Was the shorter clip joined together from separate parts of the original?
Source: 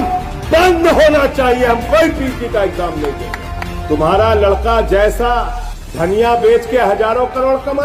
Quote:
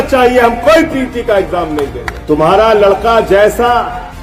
yes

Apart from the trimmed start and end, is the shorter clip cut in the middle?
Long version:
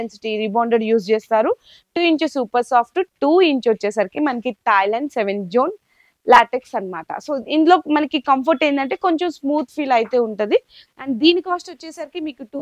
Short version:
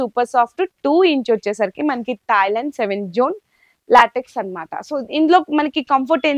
no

